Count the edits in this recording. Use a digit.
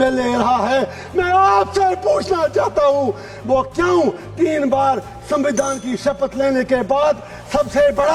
0